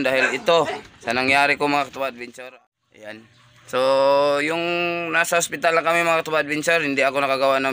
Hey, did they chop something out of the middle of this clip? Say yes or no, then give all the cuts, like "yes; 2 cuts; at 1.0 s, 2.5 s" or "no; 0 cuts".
yes; 1 cut; at 2.2 s